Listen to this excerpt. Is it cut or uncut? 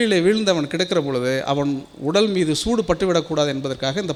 uncut